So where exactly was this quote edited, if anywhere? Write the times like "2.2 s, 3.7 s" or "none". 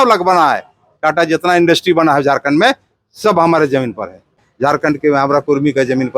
4.5 s

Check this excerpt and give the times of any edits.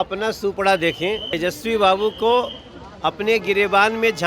1.3 s

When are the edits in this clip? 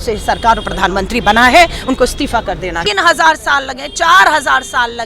2.9 s

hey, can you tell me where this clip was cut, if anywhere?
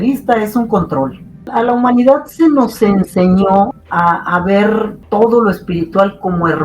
1.5 s, 3.8 s, 5.0 s

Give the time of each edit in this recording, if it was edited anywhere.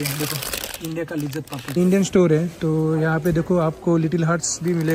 1.8 s

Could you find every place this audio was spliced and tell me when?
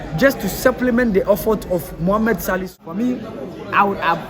2.8 s

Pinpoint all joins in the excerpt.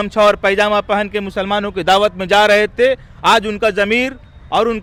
none

